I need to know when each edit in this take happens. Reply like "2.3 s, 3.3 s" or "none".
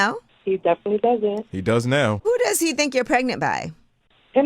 2.2 s